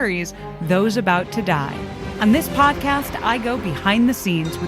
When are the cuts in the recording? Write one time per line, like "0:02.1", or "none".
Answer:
0:02.0